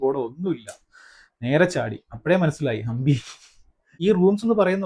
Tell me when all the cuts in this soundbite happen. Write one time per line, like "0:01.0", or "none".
0:03.9